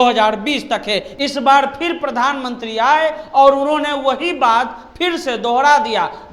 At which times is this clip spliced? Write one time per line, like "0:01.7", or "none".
0:01.1